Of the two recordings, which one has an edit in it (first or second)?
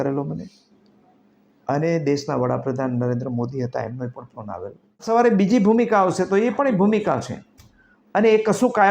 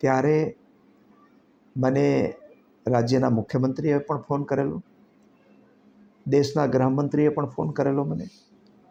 first